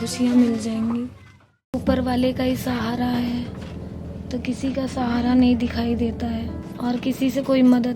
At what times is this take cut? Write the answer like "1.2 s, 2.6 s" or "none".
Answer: 1.4 s, 6.5 s